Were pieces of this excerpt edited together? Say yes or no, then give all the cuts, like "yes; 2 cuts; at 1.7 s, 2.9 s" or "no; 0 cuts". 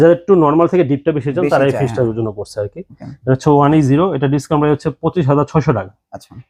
no; 0 cuts